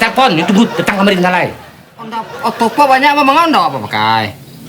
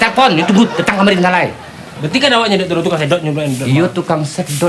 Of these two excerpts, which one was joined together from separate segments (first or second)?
first